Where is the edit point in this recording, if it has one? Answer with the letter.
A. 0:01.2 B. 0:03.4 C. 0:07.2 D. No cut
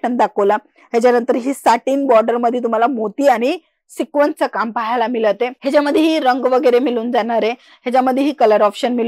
D